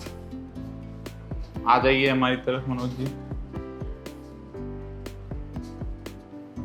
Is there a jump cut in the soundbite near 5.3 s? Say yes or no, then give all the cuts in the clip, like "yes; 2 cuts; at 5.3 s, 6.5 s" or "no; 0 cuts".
no; 2 cuts; at 1.1 s, 3.4 s